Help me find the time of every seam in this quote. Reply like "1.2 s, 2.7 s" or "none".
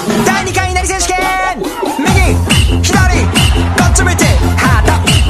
none